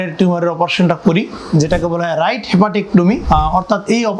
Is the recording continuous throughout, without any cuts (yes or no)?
no